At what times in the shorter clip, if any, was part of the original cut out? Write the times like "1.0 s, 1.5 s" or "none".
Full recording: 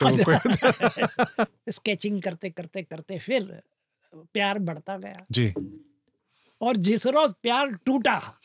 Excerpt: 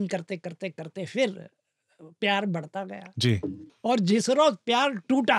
3.7 s